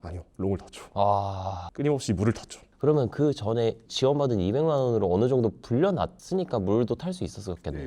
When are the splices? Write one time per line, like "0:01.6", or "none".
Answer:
none